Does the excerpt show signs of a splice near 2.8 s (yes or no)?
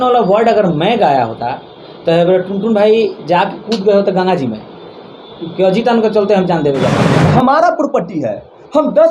no